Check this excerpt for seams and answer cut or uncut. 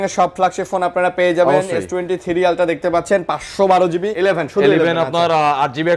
cut